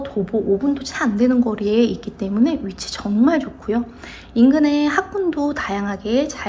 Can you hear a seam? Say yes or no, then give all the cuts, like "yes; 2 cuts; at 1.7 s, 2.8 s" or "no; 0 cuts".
no; 0 cuts